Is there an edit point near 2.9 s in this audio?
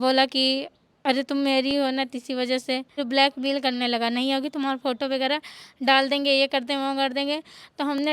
yes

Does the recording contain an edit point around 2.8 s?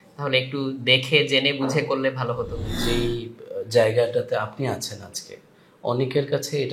yes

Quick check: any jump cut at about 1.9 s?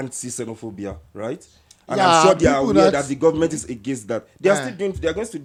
no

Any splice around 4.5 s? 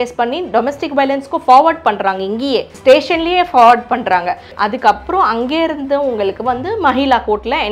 yes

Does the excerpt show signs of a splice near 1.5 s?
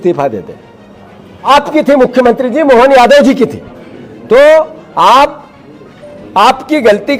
yes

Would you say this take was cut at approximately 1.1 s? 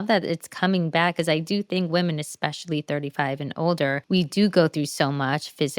no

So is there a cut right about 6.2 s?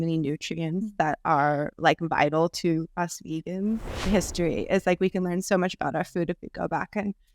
no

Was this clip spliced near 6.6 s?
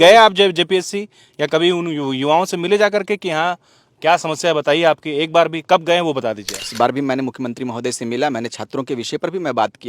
yes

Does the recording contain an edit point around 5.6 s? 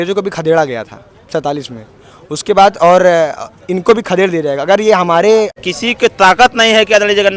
yes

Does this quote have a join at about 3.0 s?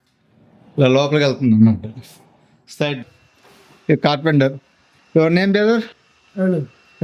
yes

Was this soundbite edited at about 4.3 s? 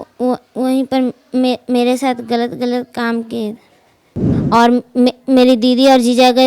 yes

